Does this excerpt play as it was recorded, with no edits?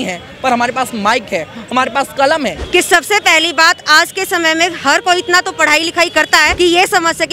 no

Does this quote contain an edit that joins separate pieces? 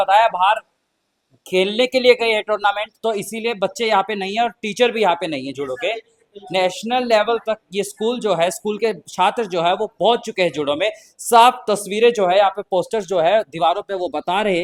no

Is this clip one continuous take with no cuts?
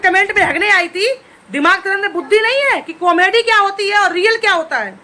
yes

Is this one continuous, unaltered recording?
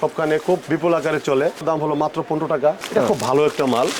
yes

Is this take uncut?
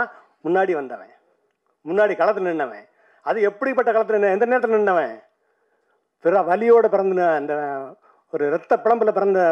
yes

